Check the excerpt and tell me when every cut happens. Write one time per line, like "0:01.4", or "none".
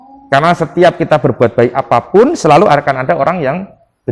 none

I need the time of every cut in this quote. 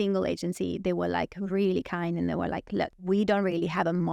0:03.0

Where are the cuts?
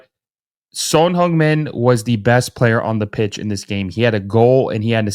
none

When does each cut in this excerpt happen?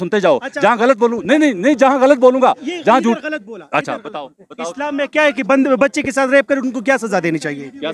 none

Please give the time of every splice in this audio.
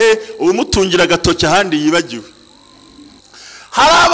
0:03.2

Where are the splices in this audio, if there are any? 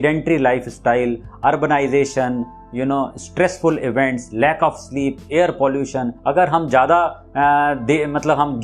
0:06.1

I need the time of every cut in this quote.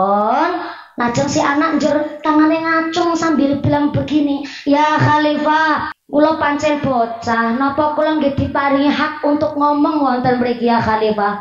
0:05.9

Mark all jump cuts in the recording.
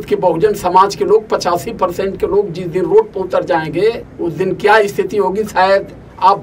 0:04.1

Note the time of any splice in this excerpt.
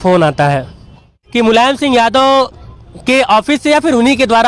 0:01.2

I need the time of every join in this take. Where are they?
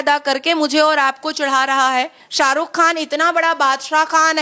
0:02.2

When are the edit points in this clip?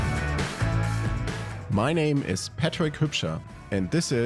0:01.0

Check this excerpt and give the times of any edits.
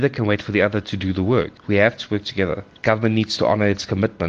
0:01.6
0:02.7

